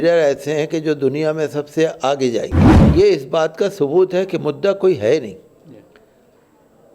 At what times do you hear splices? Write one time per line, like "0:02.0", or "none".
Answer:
0:02.8